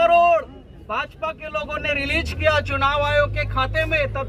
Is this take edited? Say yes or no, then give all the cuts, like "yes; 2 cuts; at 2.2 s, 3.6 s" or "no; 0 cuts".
no; 0 cuts